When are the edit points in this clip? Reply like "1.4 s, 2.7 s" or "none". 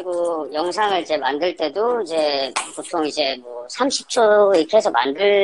none